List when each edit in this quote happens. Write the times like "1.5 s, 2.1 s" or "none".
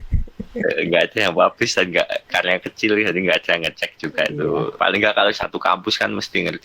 4.7 s